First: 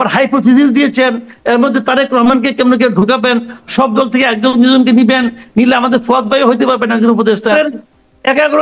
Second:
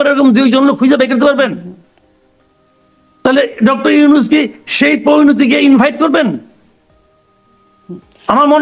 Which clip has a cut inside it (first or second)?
first